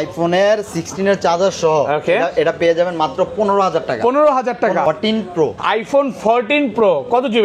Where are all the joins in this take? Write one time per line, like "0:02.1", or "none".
0:04.9